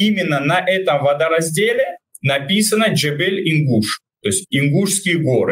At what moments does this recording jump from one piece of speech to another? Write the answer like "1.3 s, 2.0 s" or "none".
2.1 s, 4.0 s